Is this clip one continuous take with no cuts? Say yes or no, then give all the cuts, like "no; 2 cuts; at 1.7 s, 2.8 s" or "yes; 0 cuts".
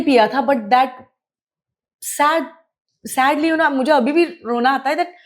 yes; 0 cuts